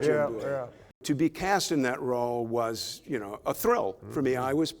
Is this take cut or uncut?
cut